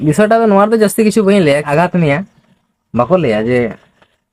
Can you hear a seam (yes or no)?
yes